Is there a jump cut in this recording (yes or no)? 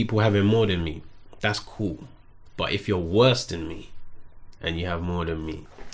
no